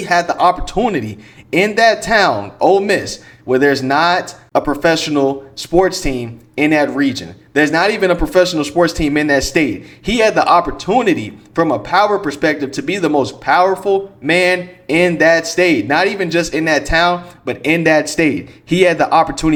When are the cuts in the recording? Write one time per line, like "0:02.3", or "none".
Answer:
none